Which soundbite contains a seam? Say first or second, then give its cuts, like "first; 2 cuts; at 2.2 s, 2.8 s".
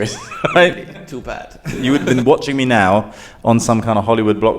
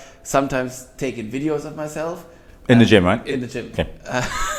first; 1 cut; at 1.8 s